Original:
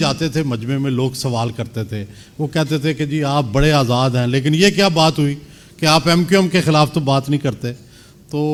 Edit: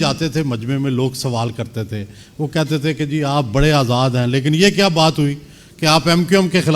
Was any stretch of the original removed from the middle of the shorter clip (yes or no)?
no